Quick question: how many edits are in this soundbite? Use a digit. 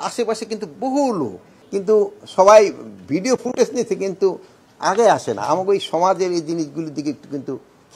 1